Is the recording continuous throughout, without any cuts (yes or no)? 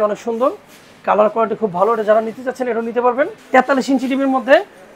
no